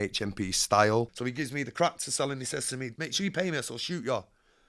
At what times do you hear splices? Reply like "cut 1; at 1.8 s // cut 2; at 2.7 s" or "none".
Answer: cut 1; at 1.1 s // cut 2; at 2.9 s